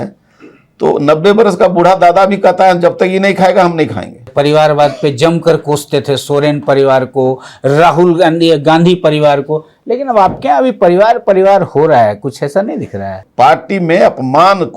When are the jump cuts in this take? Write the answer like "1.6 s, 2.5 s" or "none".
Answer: 4.2 s, 13.2 s